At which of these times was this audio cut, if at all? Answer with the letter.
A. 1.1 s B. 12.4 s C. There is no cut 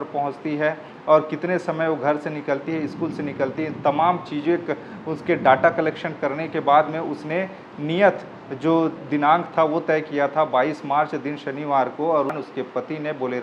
B